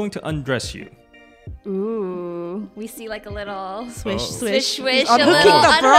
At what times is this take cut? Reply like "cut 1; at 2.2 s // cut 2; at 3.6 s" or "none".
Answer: none